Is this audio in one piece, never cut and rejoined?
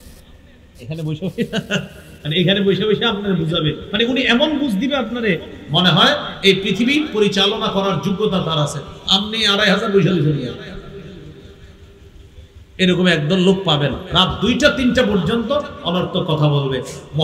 yes; 0 cuts

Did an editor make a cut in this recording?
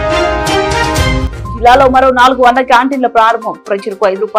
no; 0 cuts

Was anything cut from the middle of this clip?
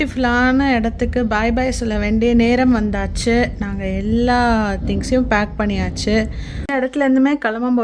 yes; 1 cut; at 6.6 s

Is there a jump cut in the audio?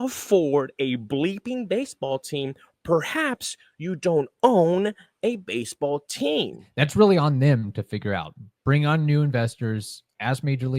yes; 1 cut; at 6.6 s

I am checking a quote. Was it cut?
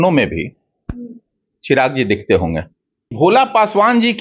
yes; 1 cut; at 3.1 s

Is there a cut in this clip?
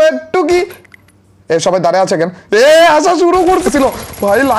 yes; 1 cut; at 3.7 s

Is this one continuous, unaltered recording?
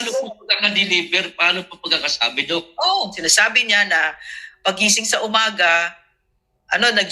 no; 1 cut; at 3.1 s

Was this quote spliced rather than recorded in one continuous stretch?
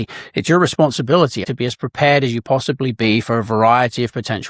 yes; 1 cut; at 1.4 s

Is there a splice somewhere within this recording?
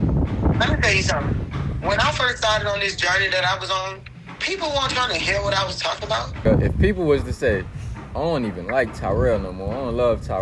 yes; 1 cut; at 6.5 s

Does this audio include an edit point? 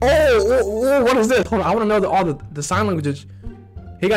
no; 0 cuts

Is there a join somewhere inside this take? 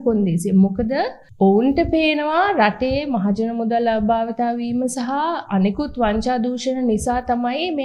yes; 1 cut; at 1.2 s

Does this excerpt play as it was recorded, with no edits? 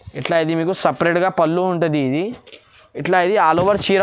yes; 0 cuts

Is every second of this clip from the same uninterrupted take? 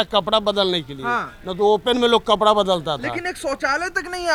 yes; 0 cuts

